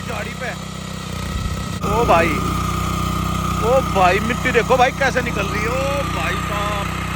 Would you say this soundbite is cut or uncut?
cut